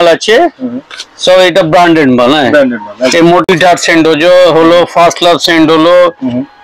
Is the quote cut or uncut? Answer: cut